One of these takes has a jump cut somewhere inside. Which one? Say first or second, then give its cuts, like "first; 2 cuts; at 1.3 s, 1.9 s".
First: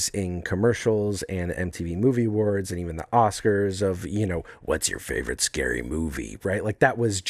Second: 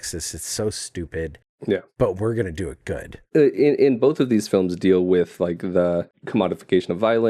second; 3 cuts; at 1.8 s, 3.1 s, 6.2 s